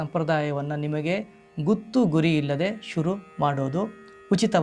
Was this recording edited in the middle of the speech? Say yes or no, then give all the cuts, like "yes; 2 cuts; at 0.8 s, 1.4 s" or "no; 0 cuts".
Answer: no; 0 cuts